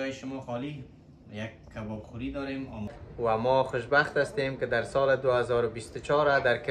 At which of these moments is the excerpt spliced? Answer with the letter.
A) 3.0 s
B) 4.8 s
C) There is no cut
A